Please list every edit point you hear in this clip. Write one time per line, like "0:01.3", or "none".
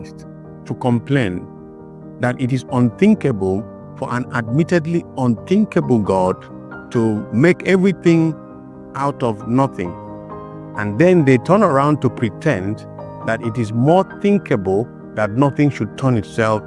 none